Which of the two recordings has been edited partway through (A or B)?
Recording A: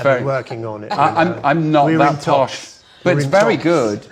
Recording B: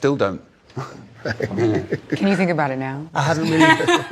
B